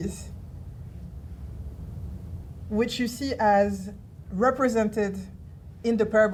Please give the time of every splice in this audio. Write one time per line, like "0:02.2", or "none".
none